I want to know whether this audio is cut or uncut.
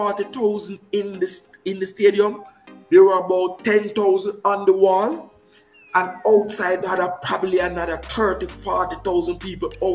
uncut